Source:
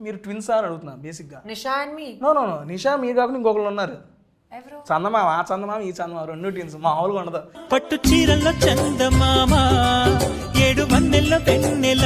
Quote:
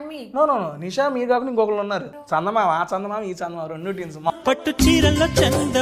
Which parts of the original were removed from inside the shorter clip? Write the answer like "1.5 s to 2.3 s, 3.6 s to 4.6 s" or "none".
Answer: 4.0 s to 4.7 s, 6.9 s to 7.6 s